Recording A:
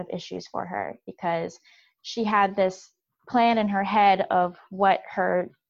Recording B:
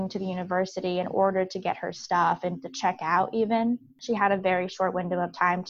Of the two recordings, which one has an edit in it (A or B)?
B